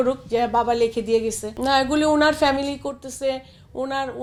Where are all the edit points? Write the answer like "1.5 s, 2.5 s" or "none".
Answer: none